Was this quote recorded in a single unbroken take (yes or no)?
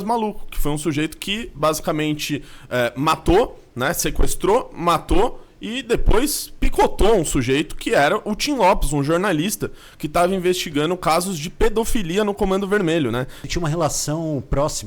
no